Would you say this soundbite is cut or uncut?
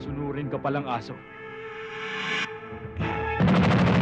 cut